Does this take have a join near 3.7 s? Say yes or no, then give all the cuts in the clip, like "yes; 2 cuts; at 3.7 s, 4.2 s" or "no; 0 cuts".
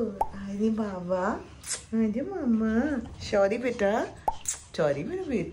no; 0 cuts